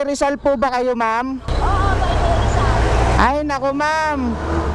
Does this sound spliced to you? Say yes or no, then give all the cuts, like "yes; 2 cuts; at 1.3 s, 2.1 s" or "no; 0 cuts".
yes; 1 cut; at 1.5 s